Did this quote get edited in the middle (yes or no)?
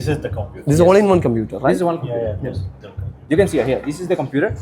no